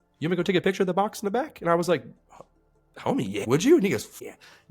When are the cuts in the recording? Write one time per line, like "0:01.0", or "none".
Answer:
0:03.4